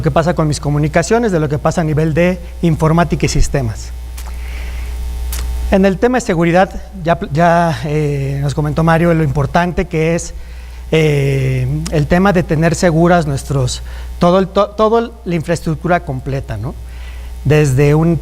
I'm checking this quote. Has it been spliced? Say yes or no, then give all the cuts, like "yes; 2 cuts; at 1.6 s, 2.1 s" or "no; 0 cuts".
yes; 1 cut; at 13.9 s